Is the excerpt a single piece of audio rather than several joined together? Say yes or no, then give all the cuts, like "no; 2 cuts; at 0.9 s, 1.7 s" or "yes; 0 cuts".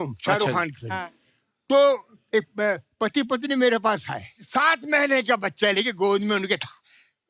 yes; 0 cuts